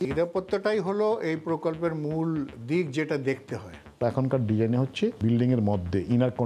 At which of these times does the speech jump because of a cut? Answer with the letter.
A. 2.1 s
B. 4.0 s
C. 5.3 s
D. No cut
B